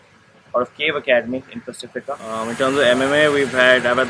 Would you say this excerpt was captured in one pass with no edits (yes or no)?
no